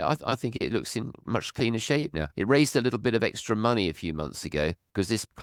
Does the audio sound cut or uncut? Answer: uncut